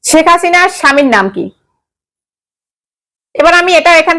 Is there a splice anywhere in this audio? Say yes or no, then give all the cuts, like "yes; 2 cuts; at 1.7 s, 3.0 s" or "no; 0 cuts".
no; 0 cuts